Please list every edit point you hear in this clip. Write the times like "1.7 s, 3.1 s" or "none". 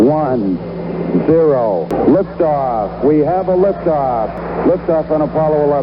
1.9 s, 4.4 s